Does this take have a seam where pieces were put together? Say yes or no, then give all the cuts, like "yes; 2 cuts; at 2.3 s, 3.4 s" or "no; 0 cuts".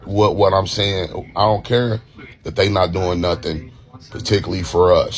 no; 0 cuts